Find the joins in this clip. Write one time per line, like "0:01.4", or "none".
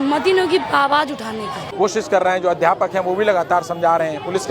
0:01.6